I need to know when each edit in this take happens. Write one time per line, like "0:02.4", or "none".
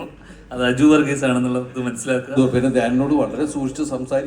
0:02.4